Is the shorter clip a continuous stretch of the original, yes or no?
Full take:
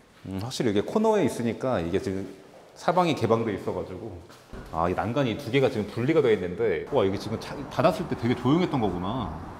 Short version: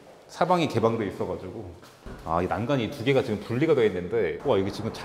yes